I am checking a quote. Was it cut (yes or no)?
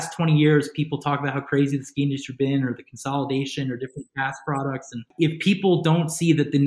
yes